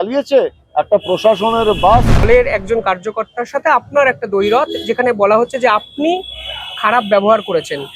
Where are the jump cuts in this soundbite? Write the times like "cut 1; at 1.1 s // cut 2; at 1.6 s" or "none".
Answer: cut 1; at 2.3 s